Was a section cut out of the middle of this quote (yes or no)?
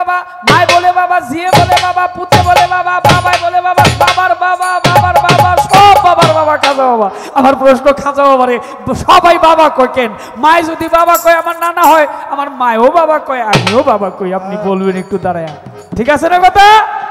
no